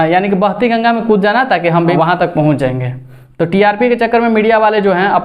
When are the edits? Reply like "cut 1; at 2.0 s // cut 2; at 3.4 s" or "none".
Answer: cut 1; at 1.9 s